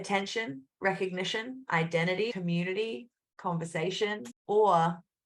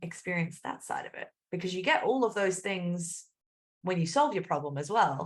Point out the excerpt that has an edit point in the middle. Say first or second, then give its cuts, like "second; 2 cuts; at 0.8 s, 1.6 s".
first; 2 cuts; at 2.3 s, 4.3 s